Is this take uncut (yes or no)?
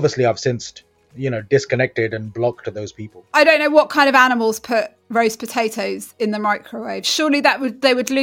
no